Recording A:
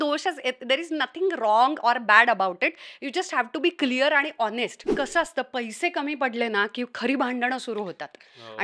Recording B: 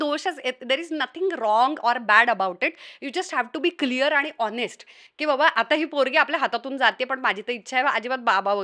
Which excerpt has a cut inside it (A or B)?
A